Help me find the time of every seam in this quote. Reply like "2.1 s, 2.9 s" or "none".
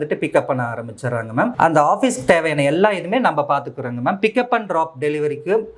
1.5 s